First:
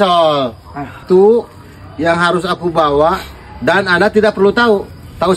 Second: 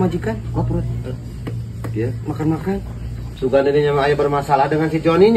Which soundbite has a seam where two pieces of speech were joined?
first; 1 cut; at 1.0 s

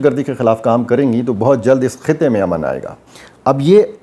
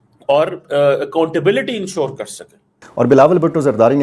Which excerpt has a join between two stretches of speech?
second; 1 cut; at 2.9 s

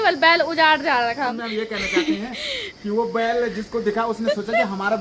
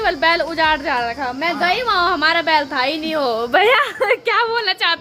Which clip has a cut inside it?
first; 1 cut; at 1.3 s

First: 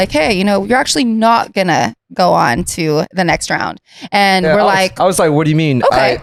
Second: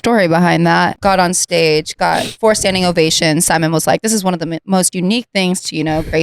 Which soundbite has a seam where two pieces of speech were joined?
second; 1 cut; at 0.9 s

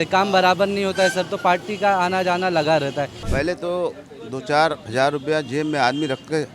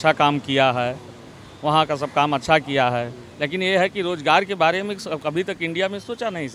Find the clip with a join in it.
first; 1 cut; at 3.2 s

